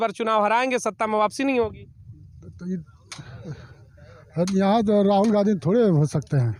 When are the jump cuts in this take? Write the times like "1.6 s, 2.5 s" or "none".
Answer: none